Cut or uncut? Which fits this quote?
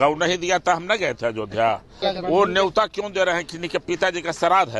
cut